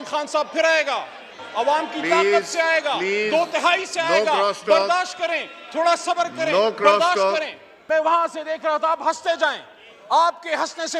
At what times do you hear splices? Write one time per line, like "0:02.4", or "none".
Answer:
0:07.7